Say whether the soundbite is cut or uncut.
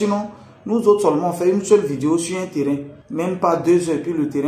cut